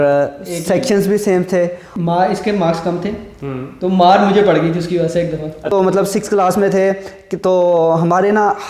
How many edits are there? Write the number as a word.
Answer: two